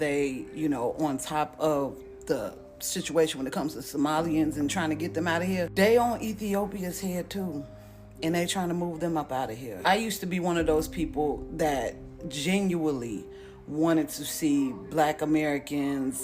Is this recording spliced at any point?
no; 0 cuts

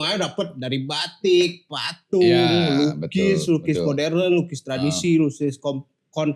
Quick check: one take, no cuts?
yes; 0 cuts

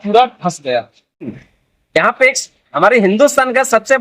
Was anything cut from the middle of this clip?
yes; 1 cut; at 1.3 s

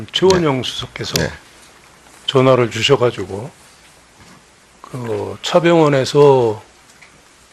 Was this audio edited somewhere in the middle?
no; 0 cuts

